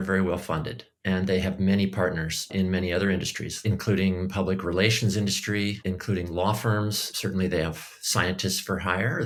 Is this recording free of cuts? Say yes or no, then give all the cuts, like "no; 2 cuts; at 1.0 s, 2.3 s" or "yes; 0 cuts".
yes; 0 cuts